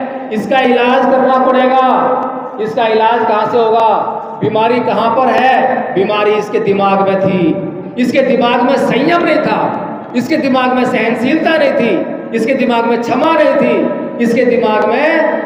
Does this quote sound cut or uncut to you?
uncut